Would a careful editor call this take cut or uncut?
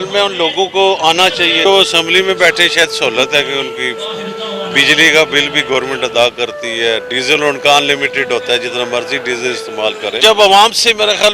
cut